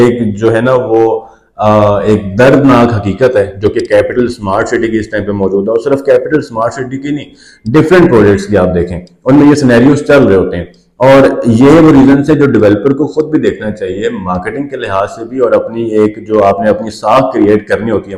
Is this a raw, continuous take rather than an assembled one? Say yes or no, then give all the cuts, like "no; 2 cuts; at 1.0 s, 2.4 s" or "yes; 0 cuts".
yes; 0 cuts